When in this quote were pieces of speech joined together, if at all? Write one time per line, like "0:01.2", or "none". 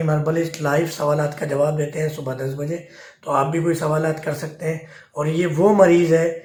none